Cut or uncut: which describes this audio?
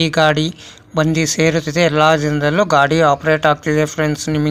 uncut